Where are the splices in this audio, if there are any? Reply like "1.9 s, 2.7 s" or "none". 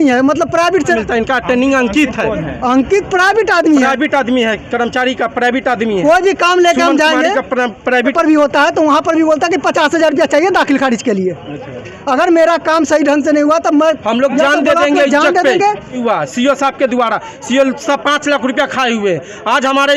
1.0 s, 8.1 s, 16.0 s